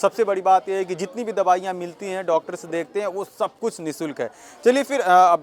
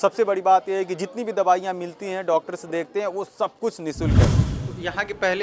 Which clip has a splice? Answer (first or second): second